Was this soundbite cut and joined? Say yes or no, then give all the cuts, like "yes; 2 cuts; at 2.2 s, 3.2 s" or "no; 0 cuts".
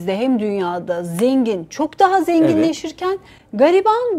no; 0 cuts